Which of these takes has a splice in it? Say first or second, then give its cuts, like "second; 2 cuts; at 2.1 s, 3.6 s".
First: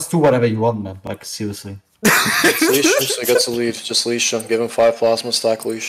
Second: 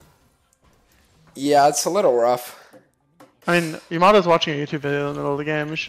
second; 1 cut; at 1.0 s